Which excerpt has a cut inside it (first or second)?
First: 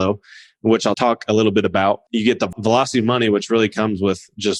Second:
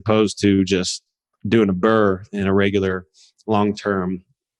first